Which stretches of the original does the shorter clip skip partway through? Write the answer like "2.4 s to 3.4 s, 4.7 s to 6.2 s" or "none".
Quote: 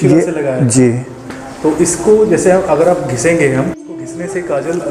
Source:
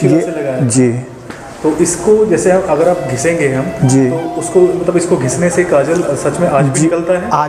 3.8 s to 5.0 s